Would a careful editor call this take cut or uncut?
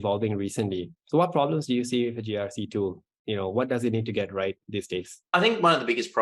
cut